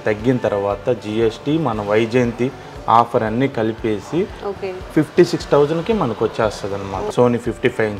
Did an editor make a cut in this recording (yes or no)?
yes